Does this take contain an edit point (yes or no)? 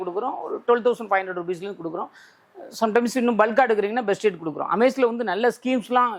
no